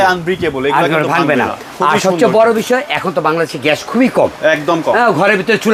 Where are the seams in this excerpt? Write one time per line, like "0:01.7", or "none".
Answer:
none